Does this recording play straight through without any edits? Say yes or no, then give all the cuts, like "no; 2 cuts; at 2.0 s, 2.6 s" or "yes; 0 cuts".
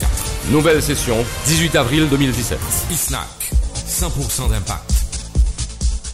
yes; 0 cuts